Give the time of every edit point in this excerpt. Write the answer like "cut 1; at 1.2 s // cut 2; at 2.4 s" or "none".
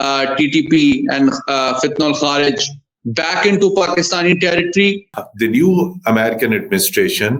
cut 1; at 5.2 s